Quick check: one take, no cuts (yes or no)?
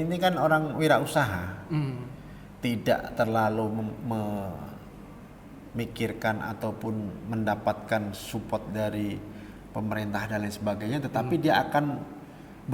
yes